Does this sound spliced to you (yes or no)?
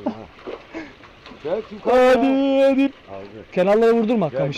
yes